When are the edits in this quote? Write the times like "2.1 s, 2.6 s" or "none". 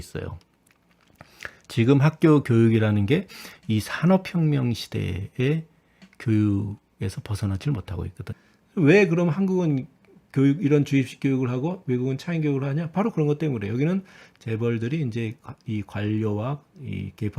8.2 s